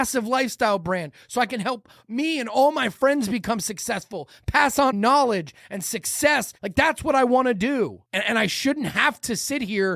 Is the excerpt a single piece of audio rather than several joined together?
no; 3 cuts; at 4.9 s, 6.6 s, 8.0 s

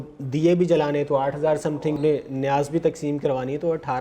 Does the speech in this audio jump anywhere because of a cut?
yes; 1 cut; at 2.0 s

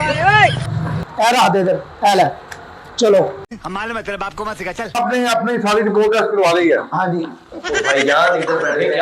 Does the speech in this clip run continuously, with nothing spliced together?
no; 3 cuts; at 1.0 s, 3.4 s, 5.0 s

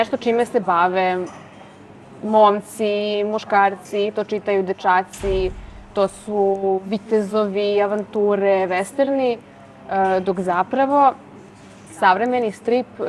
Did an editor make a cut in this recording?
no; 0 cuts

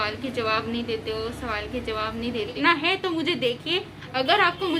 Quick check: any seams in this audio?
yes; 1 cut; at 2.6 s

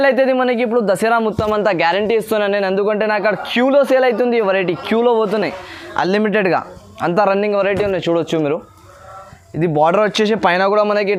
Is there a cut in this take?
no; 0 cuts

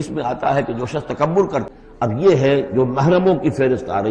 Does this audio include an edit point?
yes; 1 cut; at 1.7 s

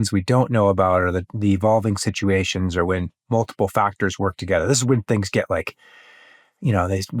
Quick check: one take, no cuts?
yes; 0 cuts

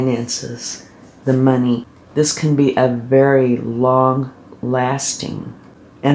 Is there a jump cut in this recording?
yes; 1 cut; at 2.0 s

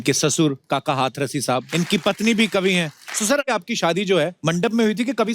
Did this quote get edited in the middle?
yes; 3 cuts; at 1.6 s, 3.5 s, 4.4 s

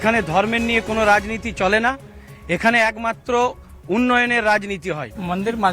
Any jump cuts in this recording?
no; 0 cuts

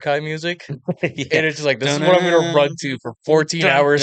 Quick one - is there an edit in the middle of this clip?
no; 0 cuts

